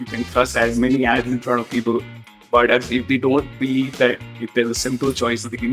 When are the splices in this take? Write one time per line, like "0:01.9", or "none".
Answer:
none